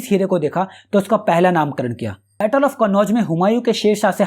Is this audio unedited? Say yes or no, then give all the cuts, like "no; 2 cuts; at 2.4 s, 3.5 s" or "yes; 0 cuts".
no; 1 cut; at 2.2 s